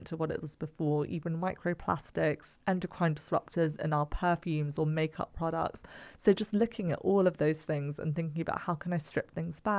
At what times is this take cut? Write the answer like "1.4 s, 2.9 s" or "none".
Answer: none